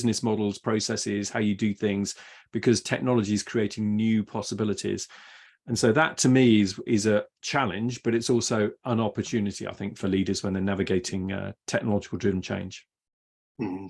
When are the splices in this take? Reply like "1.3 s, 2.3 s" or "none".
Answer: none